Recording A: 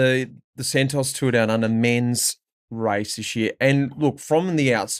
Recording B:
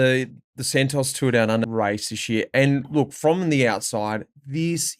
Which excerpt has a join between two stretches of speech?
B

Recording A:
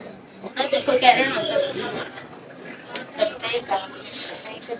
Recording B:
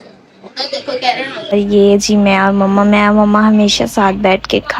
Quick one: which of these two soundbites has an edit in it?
B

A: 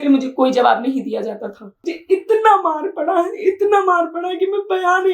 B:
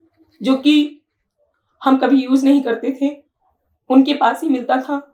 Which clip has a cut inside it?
A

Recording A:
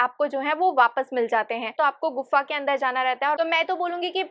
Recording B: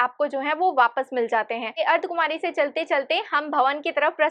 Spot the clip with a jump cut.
A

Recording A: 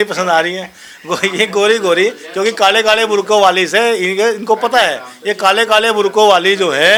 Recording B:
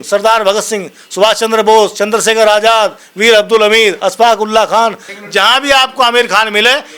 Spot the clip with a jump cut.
B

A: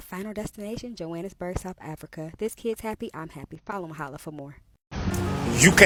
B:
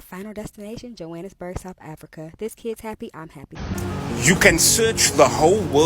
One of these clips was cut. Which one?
B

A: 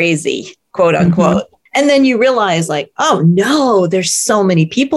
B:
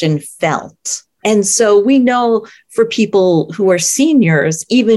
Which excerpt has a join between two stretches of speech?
A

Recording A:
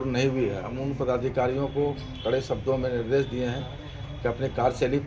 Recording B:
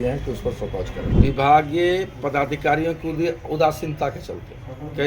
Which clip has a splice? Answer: B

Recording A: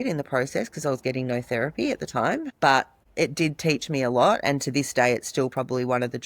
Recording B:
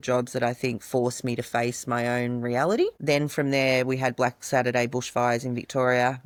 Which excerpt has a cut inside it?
A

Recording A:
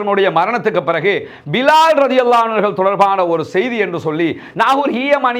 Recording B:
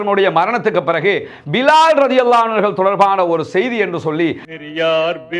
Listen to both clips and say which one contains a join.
B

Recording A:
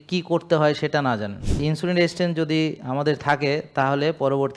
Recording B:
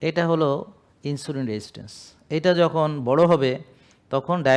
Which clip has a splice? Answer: A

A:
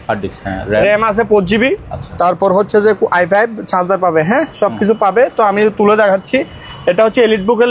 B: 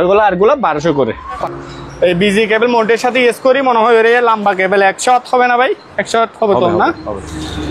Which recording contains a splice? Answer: B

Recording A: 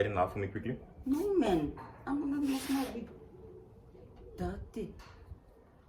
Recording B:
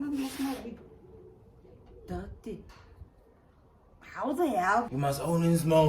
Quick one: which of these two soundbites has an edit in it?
B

